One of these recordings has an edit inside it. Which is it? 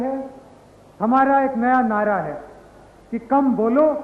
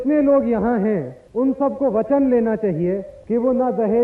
second; 2 cuts; at 1.2 s, 3.1 s

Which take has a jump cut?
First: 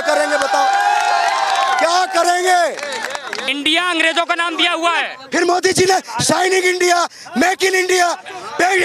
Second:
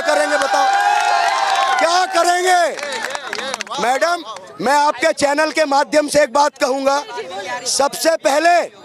first; 1 cut; at 3.5 s

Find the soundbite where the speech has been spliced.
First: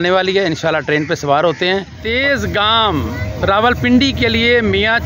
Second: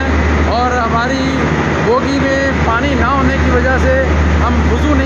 first; 1 cut; at 2.2 s

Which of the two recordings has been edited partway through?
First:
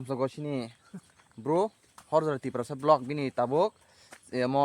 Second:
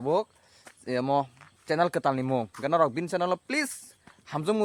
first; 1 cut; at 1.9 s

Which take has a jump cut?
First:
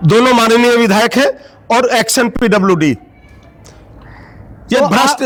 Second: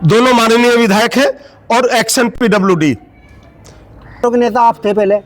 second; 1 cut; at 4.2 s

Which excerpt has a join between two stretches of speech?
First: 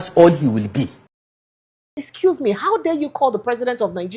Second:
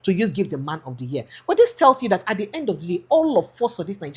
first; 1 cut; at 1.3 s

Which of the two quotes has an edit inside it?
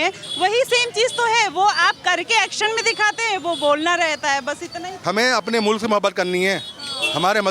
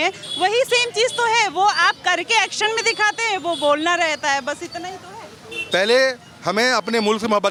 first; 1 cut; at 4.9 s

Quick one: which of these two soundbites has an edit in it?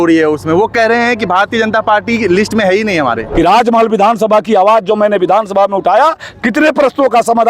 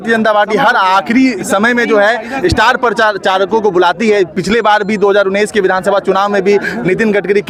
first; 1 cut; at 3.2 s

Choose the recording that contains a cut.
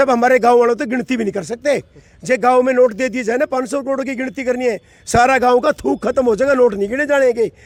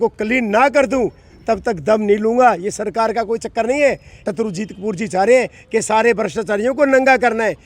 second; 1 cut; at 4.1 s

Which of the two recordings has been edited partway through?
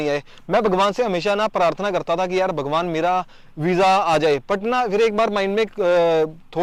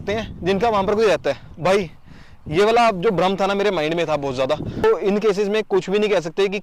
second; 1 cut; at 4.8 s

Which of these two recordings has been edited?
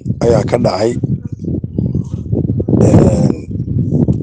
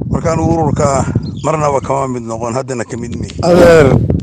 second; 1 cut; at 3.2 s

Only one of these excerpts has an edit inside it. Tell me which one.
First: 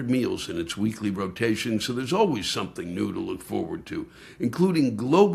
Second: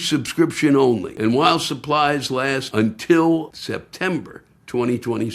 second; 3 cuts; at 1.1 s, 2.6 s, 3.6 s

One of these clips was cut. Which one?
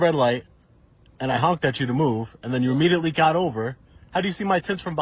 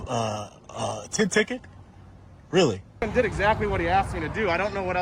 second; 1 cut; at 3.1 s

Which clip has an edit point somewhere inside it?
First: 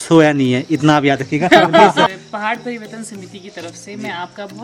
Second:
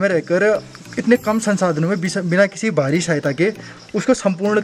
first; 1 cut; at 2.1 s

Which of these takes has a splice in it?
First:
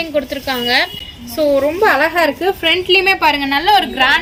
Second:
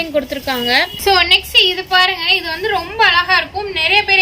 second; 1 cut; at 1.0 s

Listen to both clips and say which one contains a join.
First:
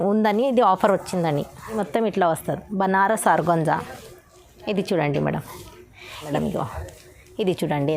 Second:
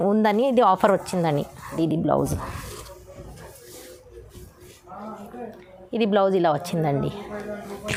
first; 2 cuts; at 1.7 s, 6.3 s

